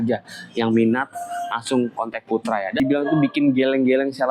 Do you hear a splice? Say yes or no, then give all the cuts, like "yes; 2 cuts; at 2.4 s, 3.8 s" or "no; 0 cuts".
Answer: yes; 1 cut; at 2.8 s